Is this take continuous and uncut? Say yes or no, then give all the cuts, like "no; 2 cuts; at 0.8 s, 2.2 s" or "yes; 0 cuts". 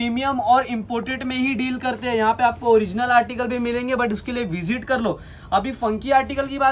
yes; 0 cuts